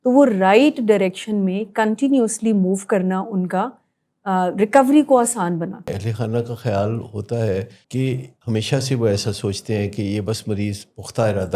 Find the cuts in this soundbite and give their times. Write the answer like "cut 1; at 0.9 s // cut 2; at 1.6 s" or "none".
cut 1; at 5.9 s // cut 2; at 8.1 s